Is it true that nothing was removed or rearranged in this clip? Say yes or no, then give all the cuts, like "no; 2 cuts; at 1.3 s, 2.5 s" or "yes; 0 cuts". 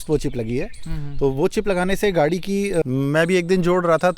no; 1 cut; at 2.8 s